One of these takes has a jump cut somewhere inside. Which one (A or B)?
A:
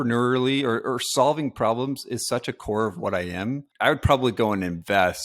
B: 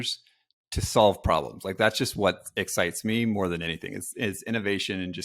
A